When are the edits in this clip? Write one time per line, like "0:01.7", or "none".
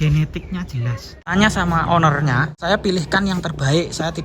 0:01.3
0:02.6